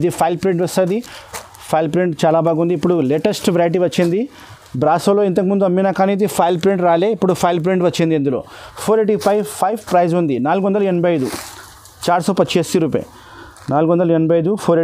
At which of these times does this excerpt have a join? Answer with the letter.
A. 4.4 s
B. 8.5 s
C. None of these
C